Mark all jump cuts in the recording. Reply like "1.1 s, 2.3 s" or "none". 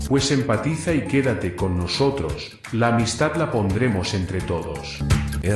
none